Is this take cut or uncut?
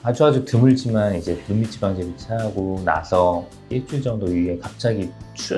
uncut